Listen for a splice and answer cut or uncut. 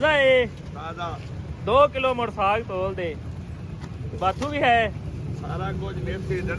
uncut